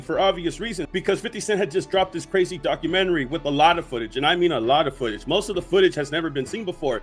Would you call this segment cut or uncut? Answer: uncut